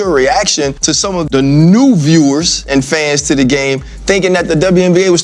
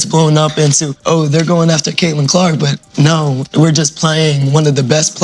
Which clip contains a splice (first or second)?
second